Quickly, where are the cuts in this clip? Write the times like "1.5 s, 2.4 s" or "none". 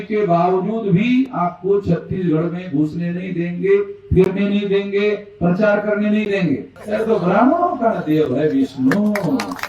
6.7 s